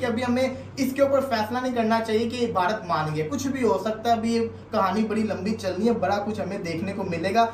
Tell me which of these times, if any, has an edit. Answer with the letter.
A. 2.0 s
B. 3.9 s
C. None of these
C